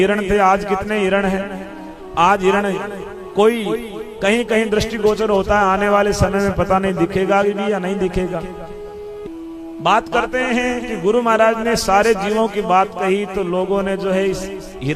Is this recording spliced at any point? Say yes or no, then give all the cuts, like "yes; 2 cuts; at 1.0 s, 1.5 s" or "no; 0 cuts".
yes; 1 cut; at 9.2 s